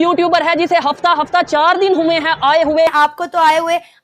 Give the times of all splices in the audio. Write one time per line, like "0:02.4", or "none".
0:02.9